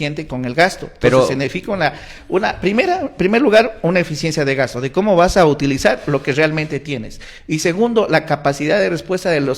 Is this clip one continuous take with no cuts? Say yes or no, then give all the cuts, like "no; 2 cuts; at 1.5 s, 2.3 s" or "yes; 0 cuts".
yes; 0 cuts